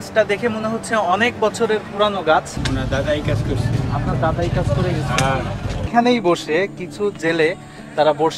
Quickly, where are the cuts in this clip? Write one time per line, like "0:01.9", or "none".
0:02.6
0:05.9